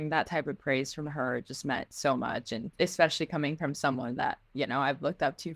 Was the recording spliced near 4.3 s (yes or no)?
no